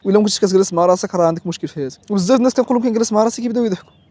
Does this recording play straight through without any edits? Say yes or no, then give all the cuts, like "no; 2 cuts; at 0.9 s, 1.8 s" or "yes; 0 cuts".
yes; 0 cuts